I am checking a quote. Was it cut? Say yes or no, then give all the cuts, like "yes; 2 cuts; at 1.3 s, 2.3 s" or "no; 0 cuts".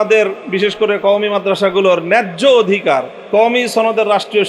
yes; 1 cut; at 3.2 s